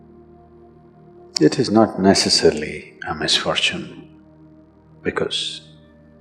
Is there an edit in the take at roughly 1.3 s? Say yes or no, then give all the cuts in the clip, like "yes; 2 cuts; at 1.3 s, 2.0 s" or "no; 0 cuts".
yes; 2 cuts; at 1.3 s, 5.4 s